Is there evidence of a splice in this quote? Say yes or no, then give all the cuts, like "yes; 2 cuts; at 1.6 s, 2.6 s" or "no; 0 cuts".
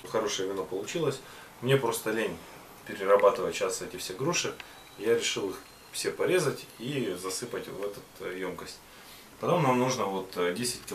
no; 0 cuts